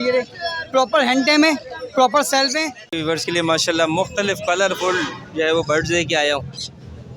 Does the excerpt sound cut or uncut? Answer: cut